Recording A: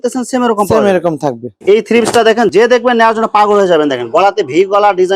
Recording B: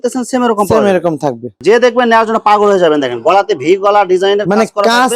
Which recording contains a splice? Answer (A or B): B